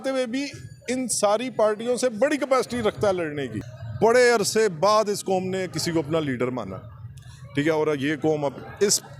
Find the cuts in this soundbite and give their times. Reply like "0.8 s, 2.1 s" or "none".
3.6 s